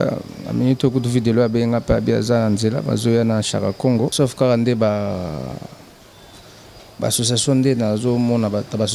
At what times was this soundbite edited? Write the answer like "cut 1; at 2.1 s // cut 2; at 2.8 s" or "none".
cut 1; at 4.1 s